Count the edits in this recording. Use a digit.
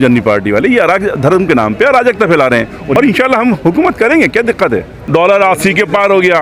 2